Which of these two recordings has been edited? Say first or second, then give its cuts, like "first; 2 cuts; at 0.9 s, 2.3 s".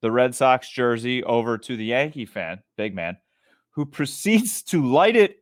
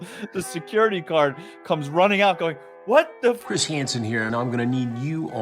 second; 1 cut; at 3.4 s